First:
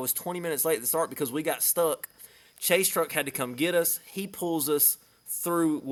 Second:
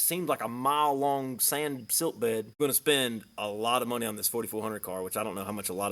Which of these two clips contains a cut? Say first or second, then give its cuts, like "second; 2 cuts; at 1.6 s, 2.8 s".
second; 1 cut; at 2.6 s